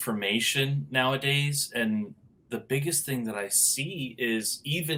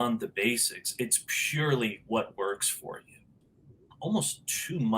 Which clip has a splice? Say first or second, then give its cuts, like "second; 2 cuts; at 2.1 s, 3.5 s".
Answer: second; 1 cut; at 3.4 s